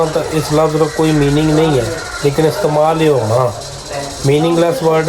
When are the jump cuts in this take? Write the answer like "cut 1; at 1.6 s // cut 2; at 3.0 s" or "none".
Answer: none